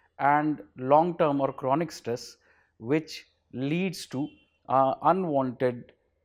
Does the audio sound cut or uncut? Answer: uncut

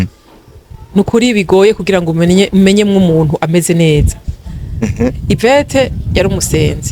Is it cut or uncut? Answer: uncut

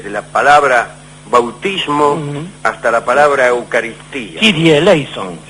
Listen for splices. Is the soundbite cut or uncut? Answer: uncut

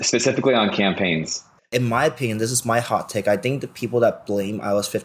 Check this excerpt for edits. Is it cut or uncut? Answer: cut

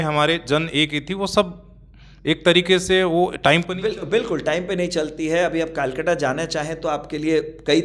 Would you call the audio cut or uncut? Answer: uncut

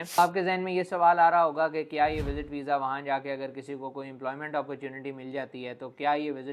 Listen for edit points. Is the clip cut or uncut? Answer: uncut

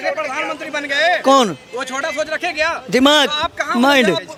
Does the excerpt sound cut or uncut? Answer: uncut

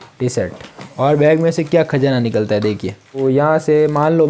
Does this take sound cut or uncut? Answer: cut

